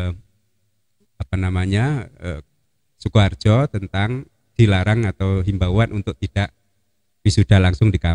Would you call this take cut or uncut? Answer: uncut